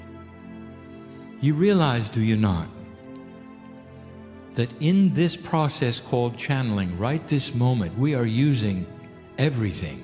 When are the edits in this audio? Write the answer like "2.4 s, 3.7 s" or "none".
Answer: 8.4 s